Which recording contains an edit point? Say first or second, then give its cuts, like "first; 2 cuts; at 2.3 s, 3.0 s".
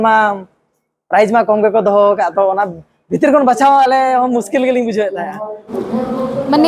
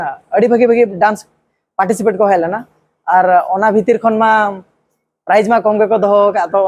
first; 1 cut; at 5.7 s